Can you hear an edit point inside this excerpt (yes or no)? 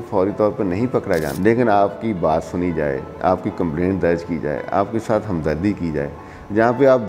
yes